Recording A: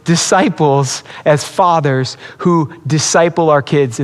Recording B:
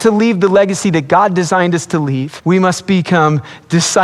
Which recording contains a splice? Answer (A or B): B